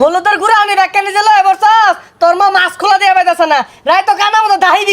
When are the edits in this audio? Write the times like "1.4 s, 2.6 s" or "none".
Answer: none